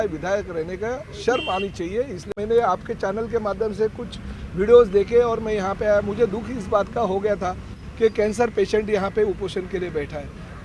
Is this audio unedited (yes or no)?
no